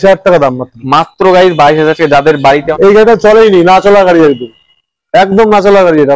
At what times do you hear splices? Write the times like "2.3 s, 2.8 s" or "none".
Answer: 2.7 s